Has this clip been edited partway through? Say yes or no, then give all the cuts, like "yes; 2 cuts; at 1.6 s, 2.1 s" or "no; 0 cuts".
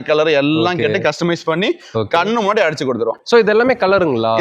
no; 0 cuts